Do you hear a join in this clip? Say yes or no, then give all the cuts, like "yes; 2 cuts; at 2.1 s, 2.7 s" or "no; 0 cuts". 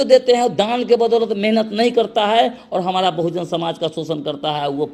no; 0 cuts